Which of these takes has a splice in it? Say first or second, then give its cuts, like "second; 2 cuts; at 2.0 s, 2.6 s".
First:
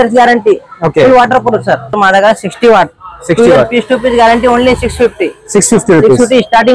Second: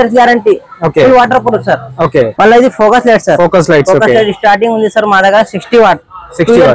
first; 1 cut; at 1.9 s